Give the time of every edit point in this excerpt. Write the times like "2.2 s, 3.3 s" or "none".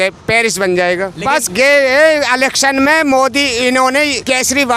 1.1 s

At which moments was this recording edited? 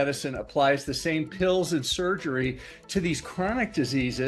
none

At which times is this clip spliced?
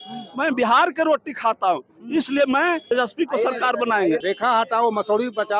2.8 s, 4.2 s

